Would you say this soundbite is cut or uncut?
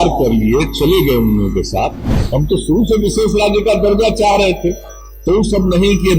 cut